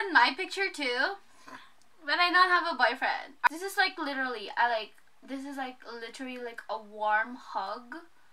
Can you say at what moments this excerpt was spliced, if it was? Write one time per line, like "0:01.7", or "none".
0:03.5